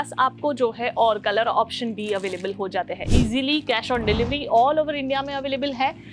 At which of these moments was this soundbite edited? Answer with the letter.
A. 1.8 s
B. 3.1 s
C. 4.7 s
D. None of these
B